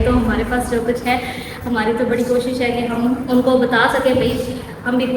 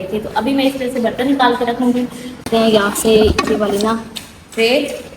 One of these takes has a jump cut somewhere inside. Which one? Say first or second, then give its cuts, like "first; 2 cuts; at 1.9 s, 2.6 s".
second; 1 cut; at 2.3 s